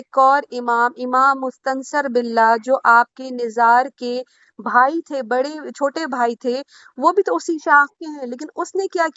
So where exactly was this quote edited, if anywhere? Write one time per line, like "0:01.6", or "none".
none